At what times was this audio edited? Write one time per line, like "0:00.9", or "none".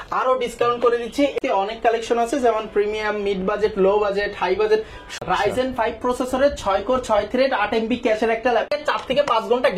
0:01.3
0:05.1
0:08.7